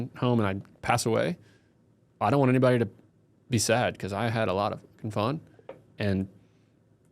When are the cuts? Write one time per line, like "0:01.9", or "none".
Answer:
none